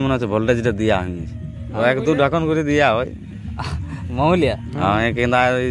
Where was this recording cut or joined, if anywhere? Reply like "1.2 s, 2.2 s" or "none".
1.8 s